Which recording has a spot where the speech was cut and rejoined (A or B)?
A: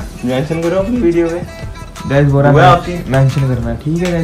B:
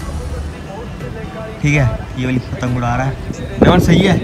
A